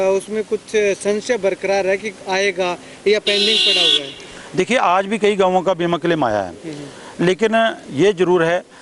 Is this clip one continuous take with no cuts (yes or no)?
yes